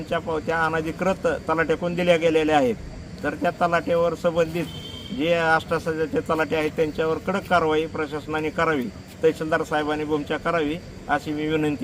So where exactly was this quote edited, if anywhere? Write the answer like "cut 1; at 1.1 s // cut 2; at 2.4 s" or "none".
none